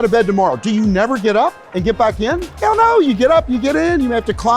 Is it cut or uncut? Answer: uncut